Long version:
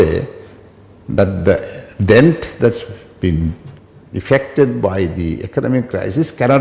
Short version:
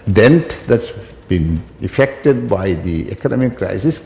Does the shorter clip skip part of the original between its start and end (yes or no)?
yes